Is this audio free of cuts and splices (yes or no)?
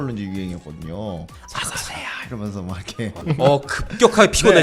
no